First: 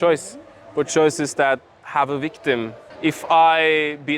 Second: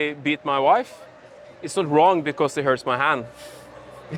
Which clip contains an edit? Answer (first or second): first